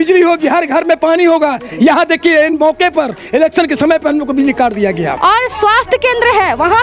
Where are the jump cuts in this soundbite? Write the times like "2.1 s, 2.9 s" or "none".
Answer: 5.2 s